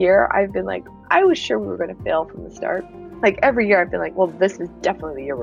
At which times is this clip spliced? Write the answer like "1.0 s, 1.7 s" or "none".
none